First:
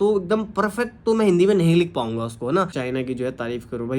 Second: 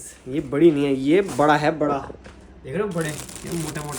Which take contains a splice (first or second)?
first